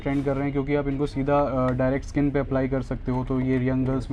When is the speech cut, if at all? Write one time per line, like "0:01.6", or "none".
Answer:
none